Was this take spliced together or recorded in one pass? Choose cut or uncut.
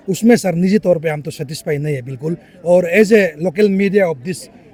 uncut